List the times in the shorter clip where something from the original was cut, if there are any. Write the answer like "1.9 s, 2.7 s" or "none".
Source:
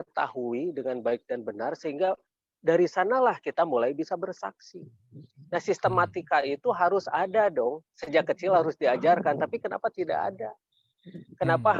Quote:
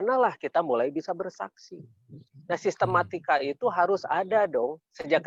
none